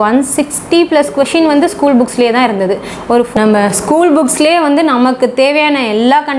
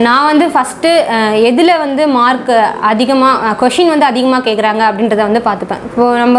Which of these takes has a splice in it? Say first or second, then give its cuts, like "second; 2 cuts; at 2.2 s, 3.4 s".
first; 1 cut; at 3.3 s